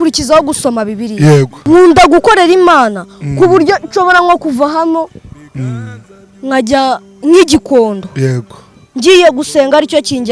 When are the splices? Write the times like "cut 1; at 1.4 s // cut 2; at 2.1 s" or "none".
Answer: cut 1; at 1.5 s